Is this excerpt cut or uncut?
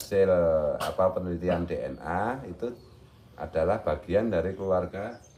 uncut